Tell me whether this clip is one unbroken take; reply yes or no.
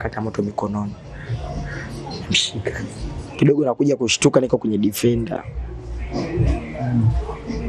no